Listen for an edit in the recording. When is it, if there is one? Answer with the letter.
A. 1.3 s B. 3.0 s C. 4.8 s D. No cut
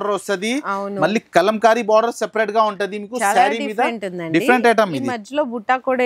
D